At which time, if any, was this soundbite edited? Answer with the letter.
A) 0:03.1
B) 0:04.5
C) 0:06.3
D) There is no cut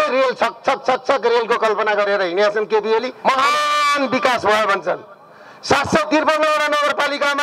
A